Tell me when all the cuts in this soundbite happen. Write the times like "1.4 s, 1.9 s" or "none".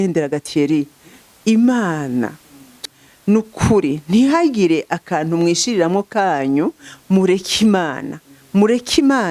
2.8 s